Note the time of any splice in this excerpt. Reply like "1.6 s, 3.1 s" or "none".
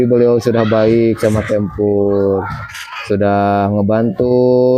none